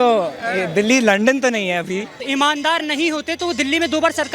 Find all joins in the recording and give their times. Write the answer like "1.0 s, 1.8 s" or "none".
2.2 s